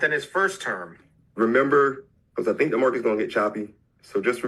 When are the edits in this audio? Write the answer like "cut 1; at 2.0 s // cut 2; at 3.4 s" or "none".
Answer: cut 1; at 1.0 s